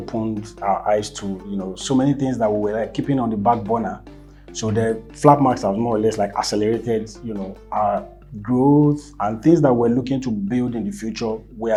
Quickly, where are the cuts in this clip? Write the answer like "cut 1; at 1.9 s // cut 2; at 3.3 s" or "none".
none